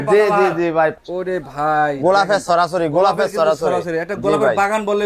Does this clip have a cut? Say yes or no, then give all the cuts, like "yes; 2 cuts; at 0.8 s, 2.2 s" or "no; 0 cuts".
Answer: yes; 1 cut; at 1.0 s